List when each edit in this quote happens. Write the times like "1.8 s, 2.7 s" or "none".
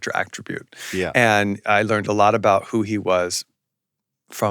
1.6 s